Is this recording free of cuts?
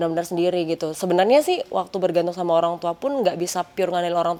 yes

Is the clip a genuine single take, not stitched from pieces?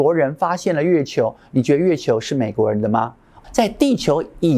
no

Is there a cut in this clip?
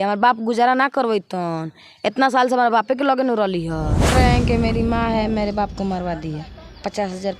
yes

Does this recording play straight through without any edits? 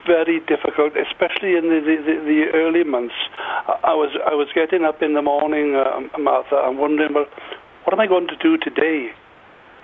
yes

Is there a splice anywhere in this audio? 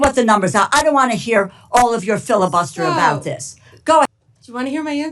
yes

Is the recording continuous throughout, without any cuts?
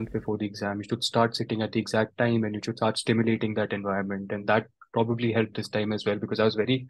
yes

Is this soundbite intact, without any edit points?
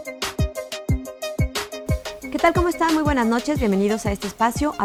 yes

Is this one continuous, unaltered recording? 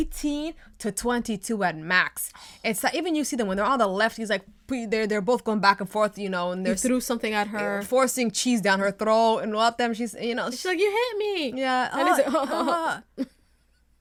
yes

